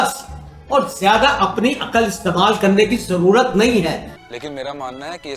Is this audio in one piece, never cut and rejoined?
no; 1 cut; at 4.1 s

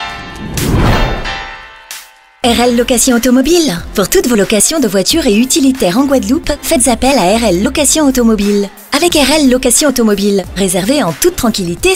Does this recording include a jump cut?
no; 0 cuts

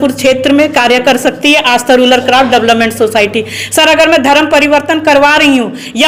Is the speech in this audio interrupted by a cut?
no; 0 cuts

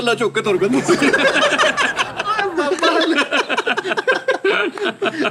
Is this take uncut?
yes; 0 cuts

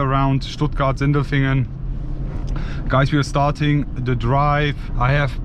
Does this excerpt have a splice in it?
no; 0 cuts

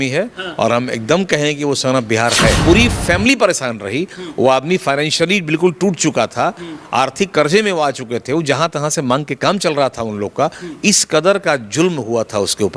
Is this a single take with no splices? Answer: no; 1 cut; at 2.6 s

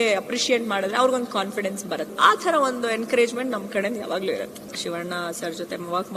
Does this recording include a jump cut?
yes; 2 cuts; at 2.1 s, 4.7 s

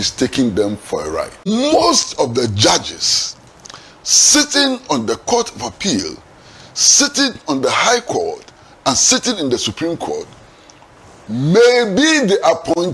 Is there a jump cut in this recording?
yes; 1 cut; at 1.5 s

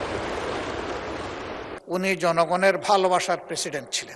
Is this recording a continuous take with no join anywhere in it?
no; 1 cut; at 1.7 s

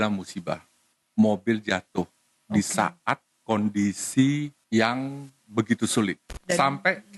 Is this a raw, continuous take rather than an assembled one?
no; 3 cuts; at 1.0 s, 4.6 s, 6.3 s

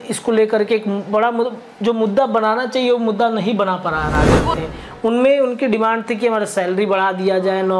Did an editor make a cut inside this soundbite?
yes; 1 cut; at 4.6 s

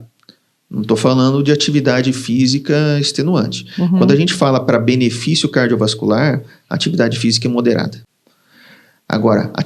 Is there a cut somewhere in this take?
no; 0 cuts

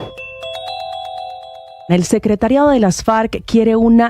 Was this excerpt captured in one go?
no; 1 cut; at 1.7 s

